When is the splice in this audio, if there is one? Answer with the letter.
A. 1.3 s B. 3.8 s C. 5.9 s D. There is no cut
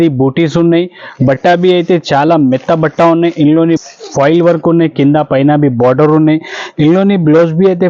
B